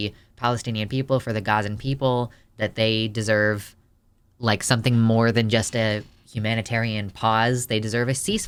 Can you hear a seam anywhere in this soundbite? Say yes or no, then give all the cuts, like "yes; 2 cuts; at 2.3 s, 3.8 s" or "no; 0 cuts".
no; 0 cuts